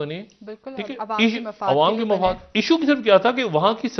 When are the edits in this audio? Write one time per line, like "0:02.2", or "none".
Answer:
none